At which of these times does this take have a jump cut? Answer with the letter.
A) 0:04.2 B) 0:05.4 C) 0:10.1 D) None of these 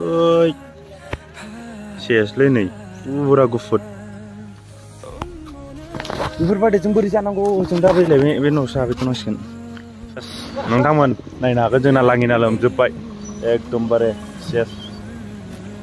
C